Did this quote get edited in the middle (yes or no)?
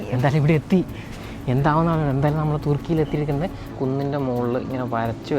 yes